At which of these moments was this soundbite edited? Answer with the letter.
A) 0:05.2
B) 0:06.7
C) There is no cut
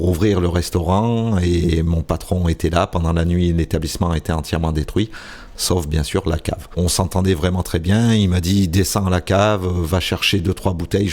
B